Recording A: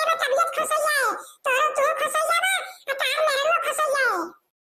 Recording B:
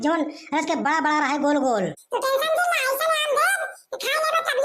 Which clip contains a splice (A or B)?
B